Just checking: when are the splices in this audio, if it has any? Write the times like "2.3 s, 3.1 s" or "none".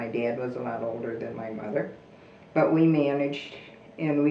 none